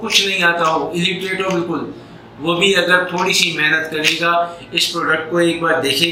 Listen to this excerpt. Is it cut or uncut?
uncut